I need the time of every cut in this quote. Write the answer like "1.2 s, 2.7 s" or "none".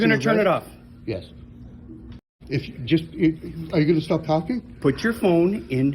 2.7 s

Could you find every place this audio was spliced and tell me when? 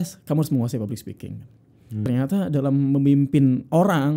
2.1 s

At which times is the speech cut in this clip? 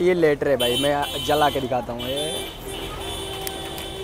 none

